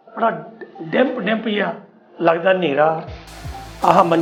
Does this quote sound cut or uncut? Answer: uncut